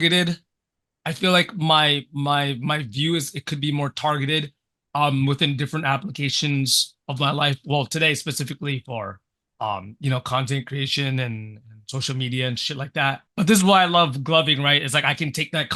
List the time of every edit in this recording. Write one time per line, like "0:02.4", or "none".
none